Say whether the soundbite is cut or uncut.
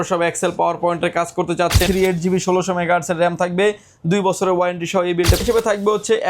cut